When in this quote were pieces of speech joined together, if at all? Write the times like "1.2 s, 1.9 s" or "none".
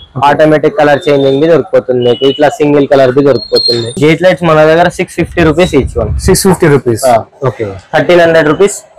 3.9 s